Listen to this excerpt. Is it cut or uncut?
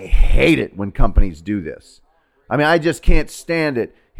uncut